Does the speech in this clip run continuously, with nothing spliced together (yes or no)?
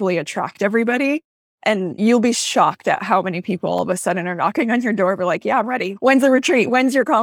no